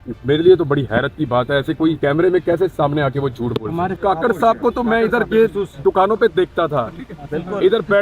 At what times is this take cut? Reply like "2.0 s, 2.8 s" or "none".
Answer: 2.0 s, 4.0 s